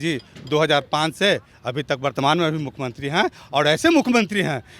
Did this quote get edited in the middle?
no; 0 cuts

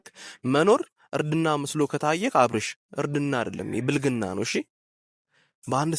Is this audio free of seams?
yes; 0 cuts

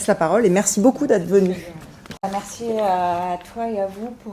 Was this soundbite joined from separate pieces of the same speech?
yes; 1 cut; at 2.2 s

